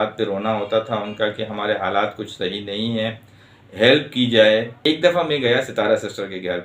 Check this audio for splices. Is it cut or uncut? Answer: cut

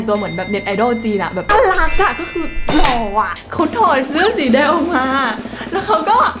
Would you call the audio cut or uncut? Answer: cut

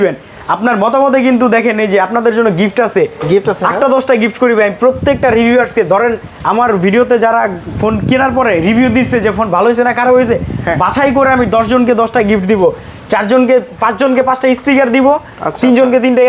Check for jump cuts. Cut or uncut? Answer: uncut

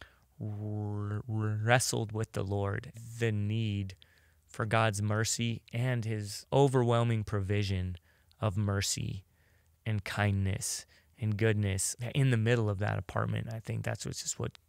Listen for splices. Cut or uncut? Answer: cut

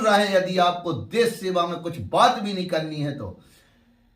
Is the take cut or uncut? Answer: uncut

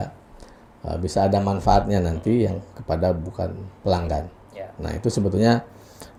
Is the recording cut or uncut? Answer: uncut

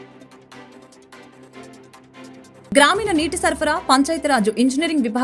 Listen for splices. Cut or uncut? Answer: cut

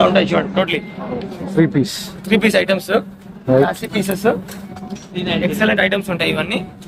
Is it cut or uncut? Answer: uncut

